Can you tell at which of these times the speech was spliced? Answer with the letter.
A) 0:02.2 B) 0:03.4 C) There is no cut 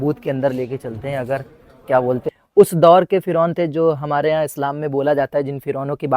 A